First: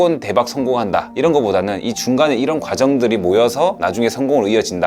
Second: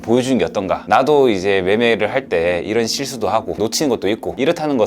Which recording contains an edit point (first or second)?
second